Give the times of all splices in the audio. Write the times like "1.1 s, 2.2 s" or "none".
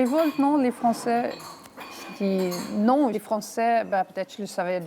3.2 s